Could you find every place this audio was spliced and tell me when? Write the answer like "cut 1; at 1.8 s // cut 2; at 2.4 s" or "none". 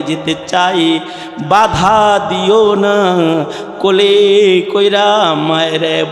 none